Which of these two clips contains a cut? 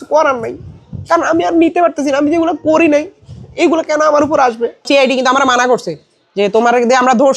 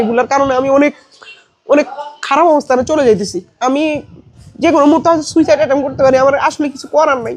first; 1 cut; at 4.8 s

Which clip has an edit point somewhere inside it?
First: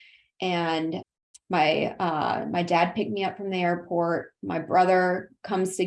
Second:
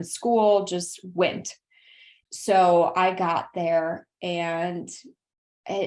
first; 1 cut; at 1.0 s

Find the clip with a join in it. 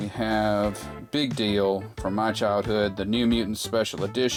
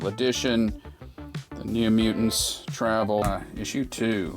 second; 1 cut; at 3.2 s

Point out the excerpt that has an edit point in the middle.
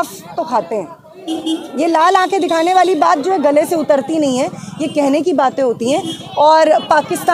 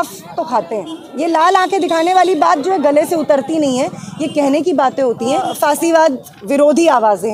second; 2 cuts; at 1.0 s, 5.5 s

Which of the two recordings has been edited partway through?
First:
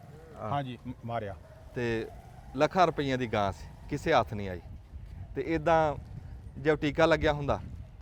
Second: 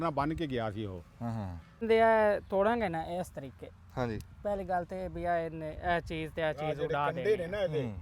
second; 1 cut; at 1.8 s

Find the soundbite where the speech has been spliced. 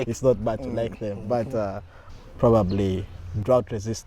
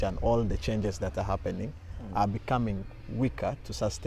first; 1 cut; at 2.1 s

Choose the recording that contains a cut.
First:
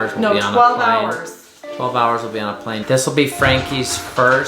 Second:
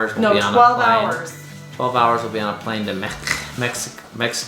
first; 1 cut; at 2.8 s

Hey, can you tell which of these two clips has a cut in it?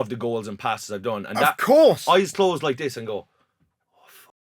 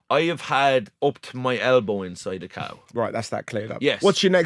first; 1 cut; at 2.0 s

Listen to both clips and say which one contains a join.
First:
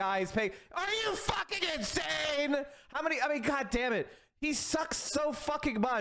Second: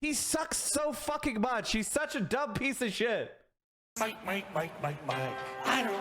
second; 1 cut; at 3.9 s

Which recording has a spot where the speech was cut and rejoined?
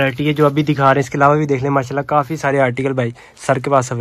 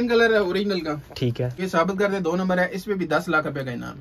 second; 1 cut; at 1.6 s

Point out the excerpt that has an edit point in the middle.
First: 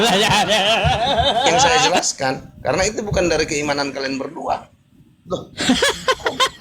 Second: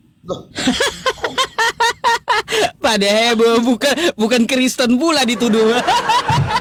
first; 1 cut; at 1.9 s

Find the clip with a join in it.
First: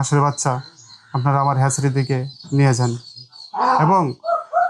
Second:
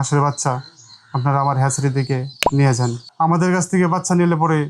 second; 1 cut; at 3.1 s

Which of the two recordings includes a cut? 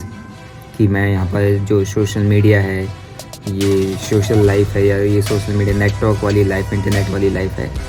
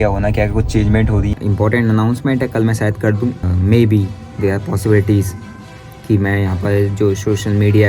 second; 2 cuts; at 1.3 s, 3.5 s

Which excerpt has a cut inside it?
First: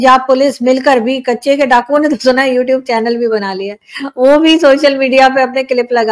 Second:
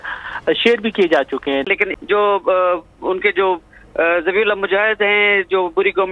second; 1 cut; at 1.7 s

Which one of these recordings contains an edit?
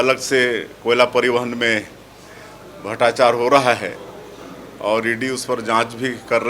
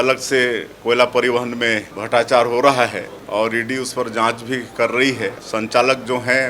second; 3 cuts; at 1.9 s, 3.1 s, 5.4 s

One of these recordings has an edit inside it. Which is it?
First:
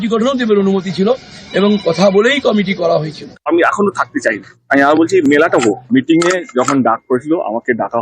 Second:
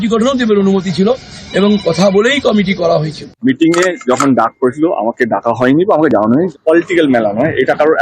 second; 2 cuts; at 3.3 s, 6.2 s

